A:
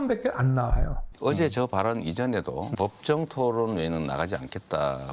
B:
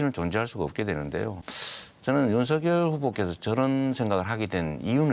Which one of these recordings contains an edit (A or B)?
A